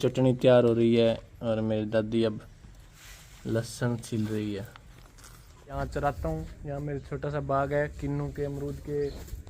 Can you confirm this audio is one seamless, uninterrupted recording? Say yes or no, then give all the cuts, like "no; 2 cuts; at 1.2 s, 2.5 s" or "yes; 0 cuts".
no; 1 cut; at 5.8 s